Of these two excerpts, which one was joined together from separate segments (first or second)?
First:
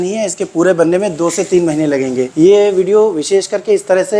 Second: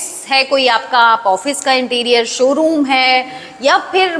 first